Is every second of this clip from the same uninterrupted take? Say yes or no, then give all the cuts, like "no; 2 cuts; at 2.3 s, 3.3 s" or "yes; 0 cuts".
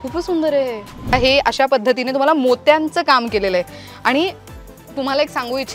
no; 1 cut; at 1.1 s